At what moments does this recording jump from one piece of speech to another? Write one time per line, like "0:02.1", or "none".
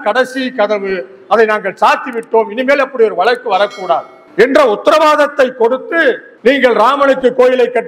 0:04.2
0:06.3

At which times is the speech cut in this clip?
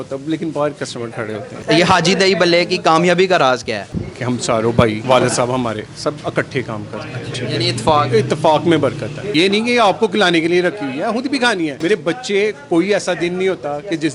0:01.5
0:03.9
0:05.0
0:07.3
0:09.2
0:11.8

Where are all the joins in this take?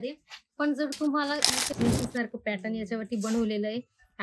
0:01.6

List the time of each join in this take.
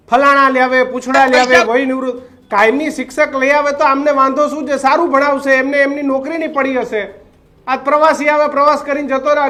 none

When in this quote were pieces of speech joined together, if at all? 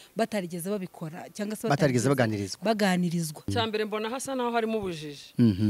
0:03.5

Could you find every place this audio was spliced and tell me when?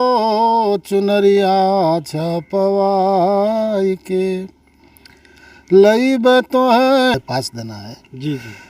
0:07.2

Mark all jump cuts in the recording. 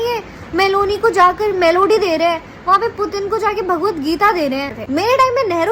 0:04.7

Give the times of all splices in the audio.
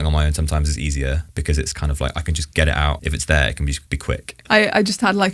0:04.3

